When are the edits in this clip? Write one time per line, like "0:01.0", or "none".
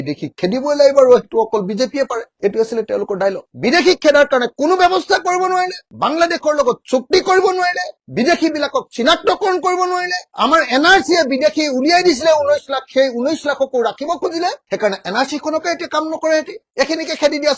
0:03.4
0:16.6

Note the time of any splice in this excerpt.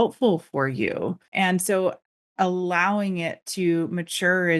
0:01.3

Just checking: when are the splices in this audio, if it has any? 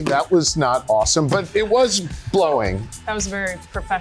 0:02.9

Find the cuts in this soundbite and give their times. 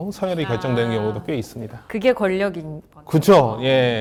none

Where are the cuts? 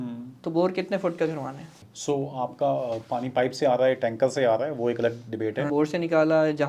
0:01.8
0:05.7

